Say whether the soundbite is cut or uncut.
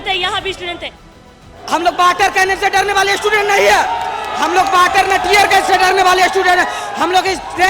cut